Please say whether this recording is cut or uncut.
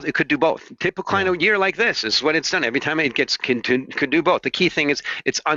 uncut